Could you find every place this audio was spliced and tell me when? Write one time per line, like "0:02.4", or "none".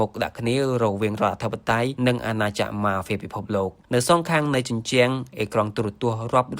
0:01.9
0:03.8